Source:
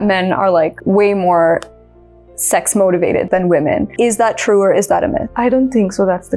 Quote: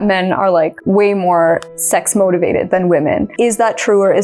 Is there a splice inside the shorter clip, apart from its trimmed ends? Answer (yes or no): yes